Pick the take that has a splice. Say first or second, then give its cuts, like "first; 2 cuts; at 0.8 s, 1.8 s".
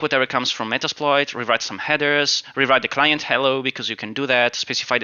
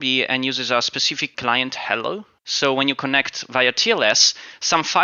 second; 2 cuts; at 1.3 s, 2.4 s